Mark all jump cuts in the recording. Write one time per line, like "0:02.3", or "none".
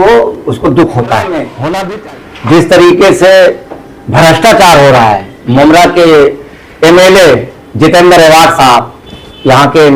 0:01.9